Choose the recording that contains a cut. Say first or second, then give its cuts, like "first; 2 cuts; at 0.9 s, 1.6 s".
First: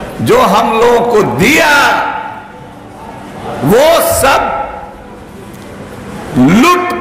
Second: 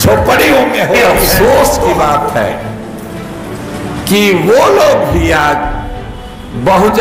second; 1 cut; at 1.0 s